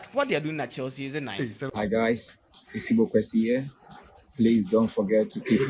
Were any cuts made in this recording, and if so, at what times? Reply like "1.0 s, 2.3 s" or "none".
1.7 s